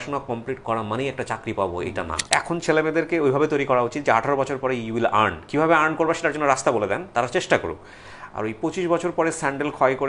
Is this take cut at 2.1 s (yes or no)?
yes